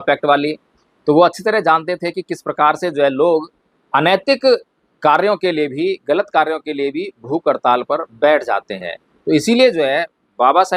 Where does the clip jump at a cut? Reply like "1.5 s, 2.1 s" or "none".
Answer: none